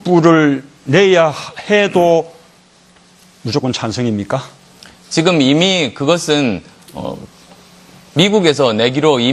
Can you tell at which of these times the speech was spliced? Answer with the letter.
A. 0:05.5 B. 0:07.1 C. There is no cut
B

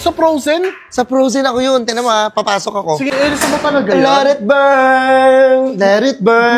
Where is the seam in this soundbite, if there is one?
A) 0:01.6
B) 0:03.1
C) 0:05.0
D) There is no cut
B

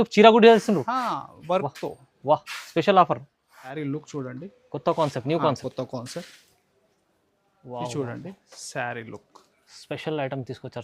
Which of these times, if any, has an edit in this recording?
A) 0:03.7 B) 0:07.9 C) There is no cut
A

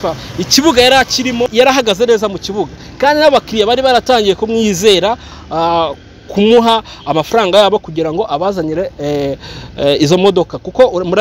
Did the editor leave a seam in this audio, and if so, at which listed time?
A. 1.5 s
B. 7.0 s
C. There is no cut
A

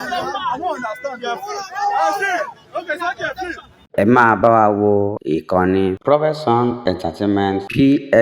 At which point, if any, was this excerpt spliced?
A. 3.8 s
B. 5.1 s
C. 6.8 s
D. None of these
A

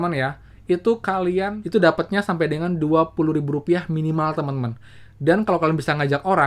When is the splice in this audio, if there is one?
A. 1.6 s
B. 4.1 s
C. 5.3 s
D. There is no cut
A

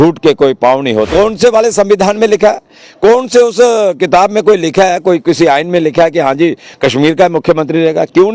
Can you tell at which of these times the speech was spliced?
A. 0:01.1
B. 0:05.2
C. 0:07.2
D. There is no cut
A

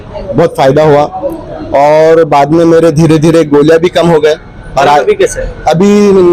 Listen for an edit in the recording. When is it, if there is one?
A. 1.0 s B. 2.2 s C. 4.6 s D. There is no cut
D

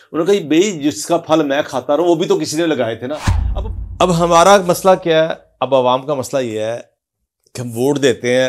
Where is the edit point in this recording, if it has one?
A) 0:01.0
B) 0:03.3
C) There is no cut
B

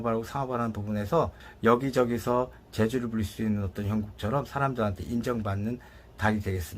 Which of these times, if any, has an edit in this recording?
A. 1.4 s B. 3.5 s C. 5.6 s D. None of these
A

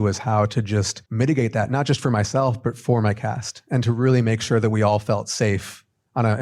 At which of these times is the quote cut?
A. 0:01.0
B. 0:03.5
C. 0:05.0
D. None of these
A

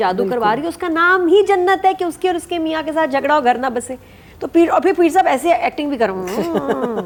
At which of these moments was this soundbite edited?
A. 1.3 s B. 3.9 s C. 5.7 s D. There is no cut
D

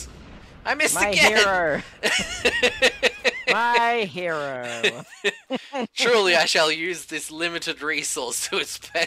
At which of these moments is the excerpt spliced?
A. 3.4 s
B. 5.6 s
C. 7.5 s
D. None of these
D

